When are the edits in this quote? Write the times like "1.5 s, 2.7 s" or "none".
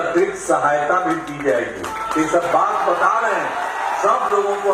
none

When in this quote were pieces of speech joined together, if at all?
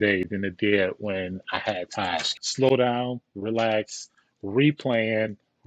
2.3 s

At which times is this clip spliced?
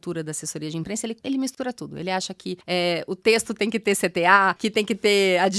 1.2 s, 2.6 s, 4.6 s

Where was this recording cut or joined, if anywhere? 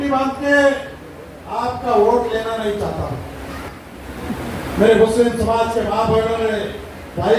3.7 s

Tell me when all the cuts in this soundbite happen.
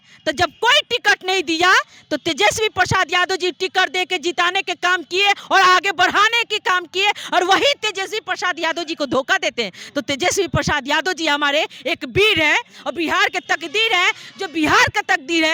none

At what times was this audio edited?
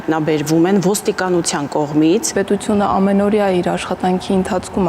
2.3 s

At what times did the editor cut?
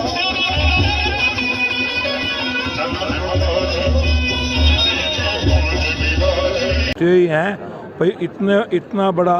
6.9 s

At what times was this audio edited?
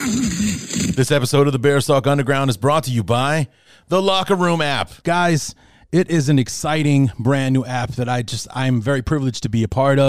0.9 s

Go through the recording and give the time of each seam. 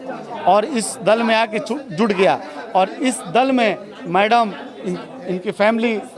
none

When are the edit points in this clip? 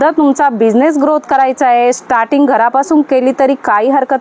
none

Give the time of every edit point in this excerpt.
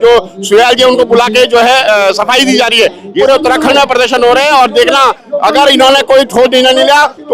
3.2 s

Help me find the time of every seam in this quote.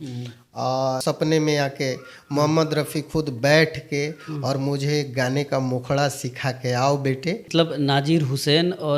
1.0 s, 7.4 s

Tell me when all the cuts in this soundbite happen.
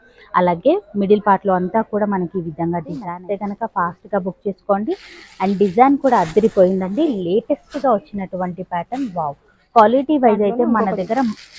3.0 s

